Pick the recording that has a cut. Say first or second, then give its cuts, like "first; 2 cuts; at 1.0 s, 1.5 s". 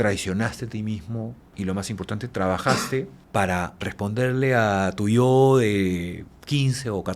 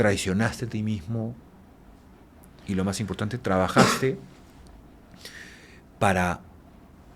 first; 3 cuts; at 1.4 s, 3.2 s, 3.7 s